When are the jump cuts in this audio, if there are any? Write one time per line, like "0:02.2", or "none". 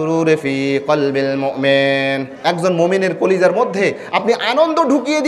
none